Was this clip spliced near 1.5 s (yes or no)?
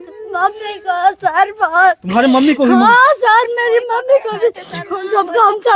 no